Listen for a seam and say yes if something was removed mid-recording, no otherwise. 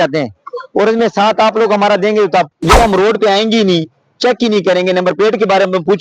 yes